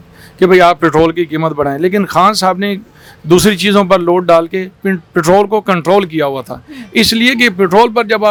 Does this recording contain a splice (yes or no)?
no